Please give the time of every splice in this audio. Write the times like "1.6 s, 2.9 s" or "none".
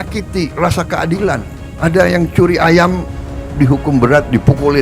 1.6 s